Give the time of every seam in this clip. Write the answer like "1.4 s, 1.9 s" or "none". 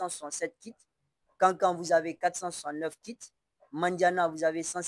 none